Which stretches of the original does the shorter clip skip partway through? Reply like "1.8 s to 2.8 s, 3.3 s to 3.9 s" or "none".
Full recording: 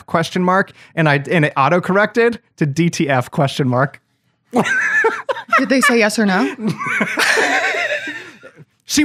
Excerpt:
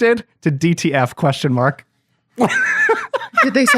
none